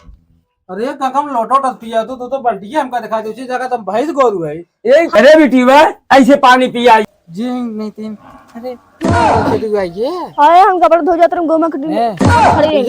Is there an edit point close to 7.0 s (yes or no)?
yes